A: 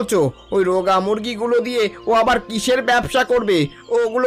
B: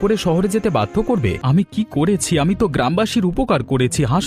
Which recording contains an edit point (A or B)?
B